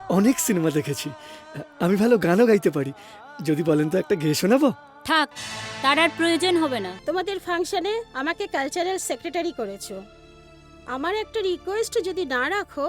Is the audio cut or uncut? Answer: cut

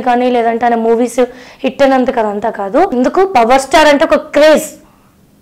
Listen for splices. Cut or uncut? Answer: cut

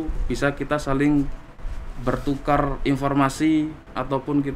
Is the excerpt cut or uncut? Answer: uncut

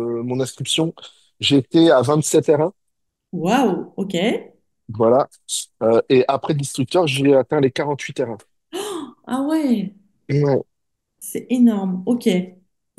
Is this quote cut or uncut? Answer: uncut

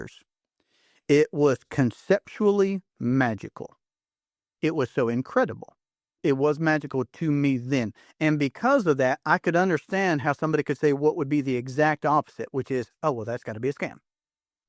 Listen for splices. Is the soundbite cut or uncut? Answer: cut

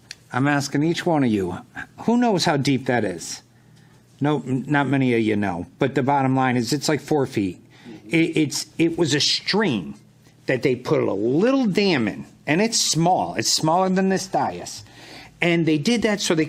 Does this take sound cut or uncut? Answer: uncut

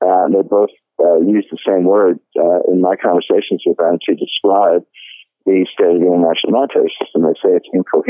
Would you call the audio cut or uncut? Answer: uncut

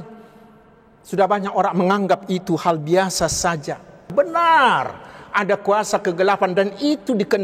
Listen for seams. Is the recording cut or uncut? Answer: cut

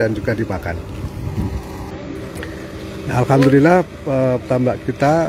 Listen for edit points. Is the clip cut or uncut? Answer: cut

